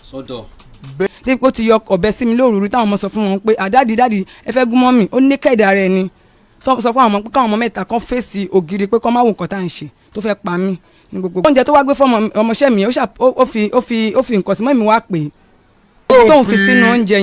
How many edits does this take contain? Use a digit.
3